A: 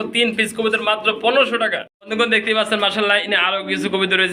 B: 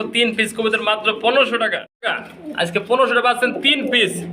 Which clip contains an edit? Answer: B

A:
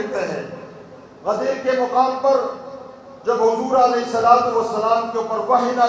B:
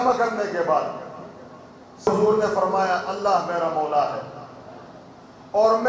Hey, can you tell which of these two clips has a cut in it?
B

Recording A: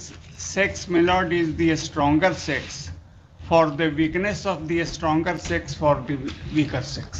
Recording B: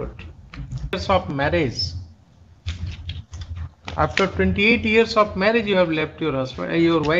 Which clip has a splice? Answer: B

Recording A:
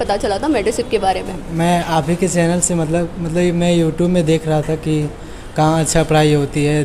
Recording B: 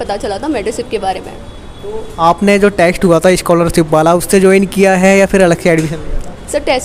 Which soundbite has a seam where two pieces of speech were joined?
A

